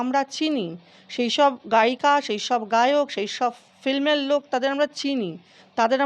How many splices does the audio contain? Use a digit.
0